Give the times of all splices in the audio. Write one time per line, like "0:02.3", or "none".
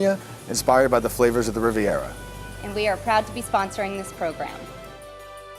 0:04.6